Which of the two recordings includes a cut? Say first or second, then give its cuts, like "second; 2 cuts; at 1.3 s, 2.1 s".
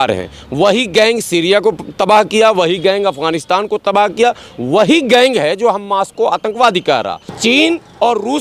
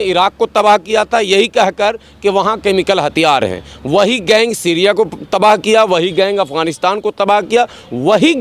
first; 1 cut; at 7.4 s